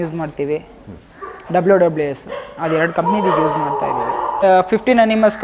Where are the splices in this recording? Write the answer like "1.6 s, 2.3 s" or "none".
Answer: 4.4 s